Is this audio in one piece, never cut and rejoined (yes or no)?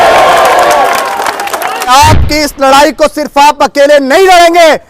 no